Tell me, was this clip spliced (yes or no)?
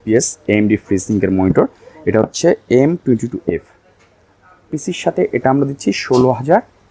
no